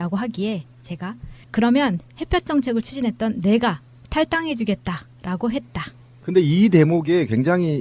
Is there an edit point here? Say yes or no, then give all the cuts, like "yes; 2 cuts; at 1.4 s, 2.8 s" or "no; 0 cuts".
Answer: yes; 1 cut; at 3.9 s